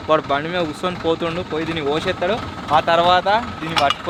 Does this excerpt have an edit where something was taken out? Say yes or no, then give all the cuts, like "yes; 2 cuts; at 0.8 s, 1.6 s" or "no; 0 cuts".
no; 0 cuts